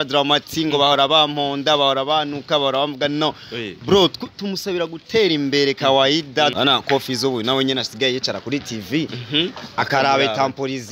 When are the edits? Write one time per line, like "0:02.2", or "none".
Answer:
0:06.5